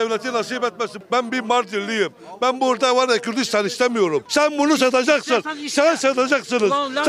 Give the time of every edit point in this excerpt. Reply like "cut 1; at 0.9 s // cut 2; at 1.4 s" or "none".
cut 1; at 1.0 s // cut 2; at 4.2 s